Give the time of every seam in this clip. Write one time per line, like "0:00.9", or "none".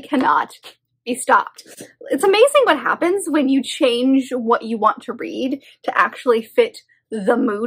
none